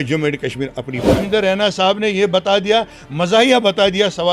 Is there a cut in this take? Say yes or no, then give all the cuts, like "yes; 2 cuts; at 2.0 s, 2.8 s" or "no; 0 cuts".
yes; 1 cut; at 1.1 s